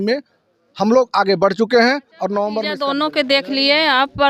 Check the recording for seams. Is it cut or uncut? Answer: cut